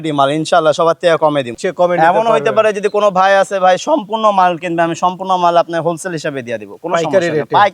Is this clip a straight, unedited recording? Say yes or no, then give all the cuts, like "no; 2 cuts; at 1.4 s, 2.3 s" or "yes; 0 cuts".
no; 1 cut; at 1.6 s